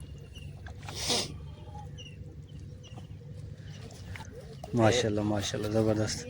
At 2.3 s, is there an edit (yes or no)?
no